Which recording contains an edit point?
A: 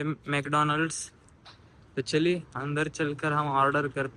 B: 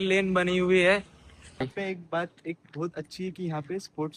B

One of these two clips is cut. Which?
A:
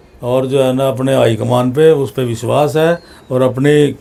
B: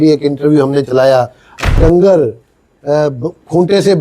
B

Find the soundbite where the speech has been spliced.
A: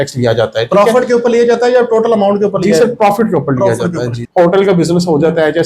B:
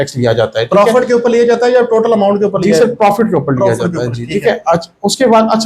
A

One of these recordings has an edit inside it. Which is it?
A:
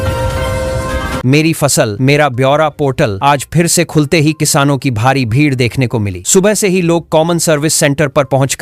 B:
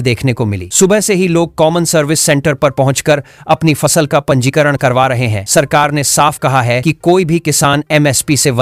A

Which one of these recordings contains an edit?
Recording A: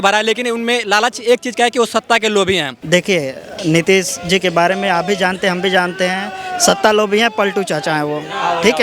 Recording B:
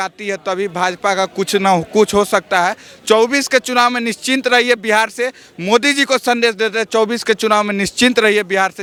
A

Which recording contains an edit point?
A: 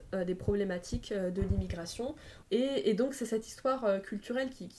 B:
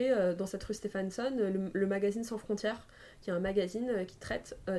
A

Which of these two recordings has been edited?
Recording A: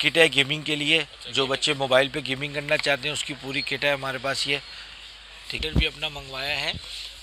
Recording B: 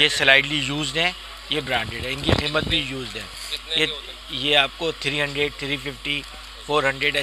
A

